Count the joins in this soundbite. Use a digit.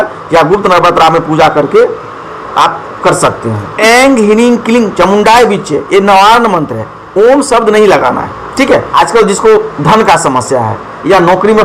2